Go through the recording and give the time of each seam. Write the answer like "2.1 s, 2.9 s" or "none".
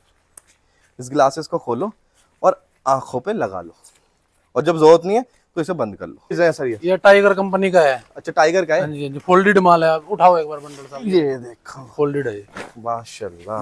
6.4 s